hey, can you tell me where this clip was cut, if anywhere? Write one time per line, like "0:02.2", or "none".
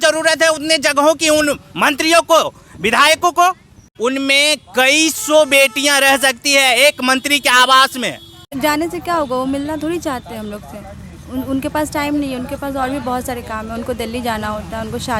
0:03.8
0:08.4